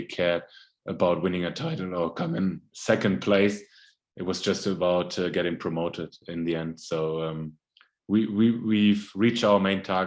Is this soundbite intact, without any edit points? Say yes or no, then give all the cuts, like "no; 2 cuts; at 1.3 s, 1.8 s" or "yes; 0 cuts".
yes; 0 cuts